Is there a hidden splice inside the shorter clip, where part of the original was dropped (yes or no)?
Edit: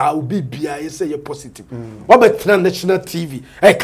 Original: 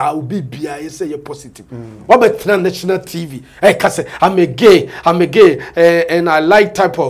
no